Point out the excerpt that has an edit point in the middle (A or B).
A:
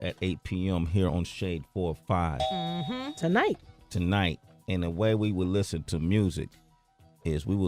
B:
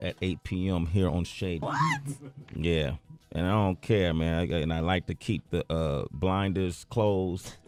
A